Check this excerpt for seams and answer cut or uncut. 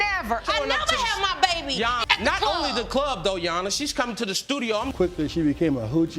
cut